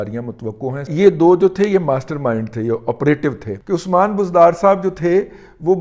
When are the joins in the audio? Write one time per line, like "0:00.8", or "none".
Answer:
0:00.9
0:03.5